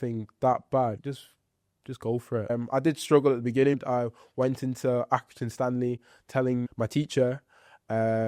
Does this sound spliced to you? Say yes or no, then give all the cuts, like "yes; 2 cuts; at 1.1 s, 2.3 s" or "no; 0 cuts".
yes; 4 cuts; at 1.0 s, 2.5 s, 3.8 s, 6.7 s